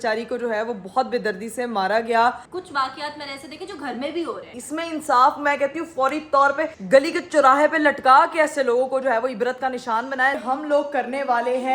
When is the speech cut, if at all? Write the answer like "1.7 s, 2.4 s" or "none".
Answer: 2.5 s, 4.5 s, 10.4 s